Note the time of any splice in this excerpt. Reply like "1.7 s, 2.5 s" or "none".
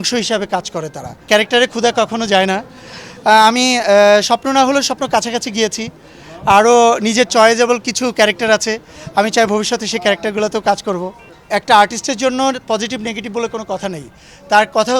1.3 s